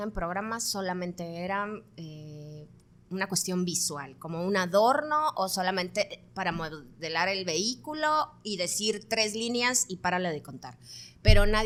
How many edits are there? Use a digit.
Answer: 0